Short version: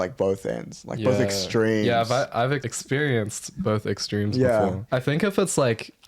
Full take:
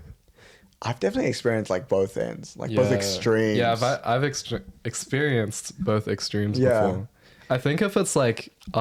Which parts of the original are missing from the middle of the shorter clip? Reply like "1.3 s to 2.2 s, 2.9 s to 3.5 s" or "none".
4.4 s to 4.9 s, 7.0 s to 7.4 s